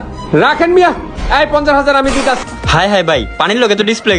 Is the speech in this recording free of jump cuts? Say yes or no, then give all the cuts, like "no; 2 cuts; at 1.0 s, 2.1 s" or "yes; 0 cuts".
no; 1 cut; at 2.4 s